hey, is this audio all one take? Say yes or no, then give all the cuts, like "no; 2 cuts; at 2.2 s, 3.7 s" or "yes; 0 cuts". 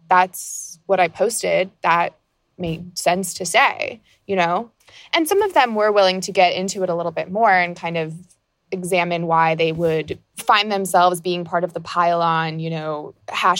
no; 2 cuts; at 4.7 s, 10.3 s